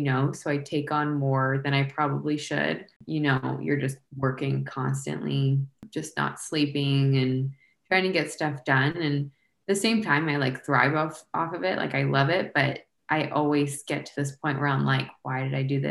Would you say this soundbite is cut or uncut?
cut